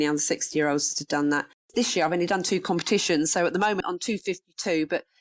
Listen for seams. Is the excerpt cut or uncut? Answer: cut